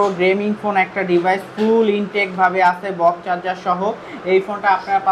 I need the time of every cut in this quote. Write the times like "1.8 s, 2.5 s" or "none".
none